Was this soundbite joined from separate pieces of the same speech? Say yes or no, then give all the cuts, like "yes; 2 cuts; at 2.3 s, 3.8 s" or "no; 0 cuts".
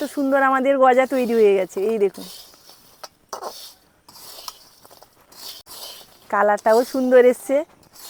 no; 0 cuts